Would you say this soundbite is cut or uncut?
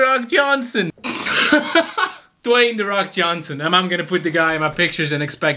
uncut